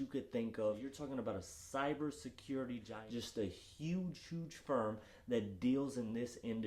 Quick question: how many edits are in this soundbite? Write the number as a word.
two